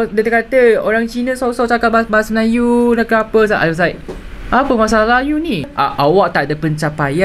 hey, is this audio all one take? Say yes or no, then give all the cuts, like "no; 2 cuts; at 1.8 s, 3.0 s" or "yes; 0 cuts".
no; 1 cut; at 5.7 s